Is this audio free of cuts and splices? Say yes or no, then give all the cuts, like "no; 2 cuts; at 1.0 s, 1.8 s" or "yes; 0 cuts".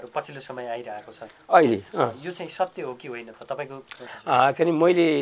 no; 1 cut; at 4.1 s